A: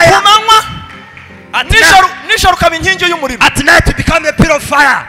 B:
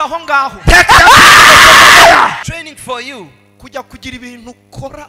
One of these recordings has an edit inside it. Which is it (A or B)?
B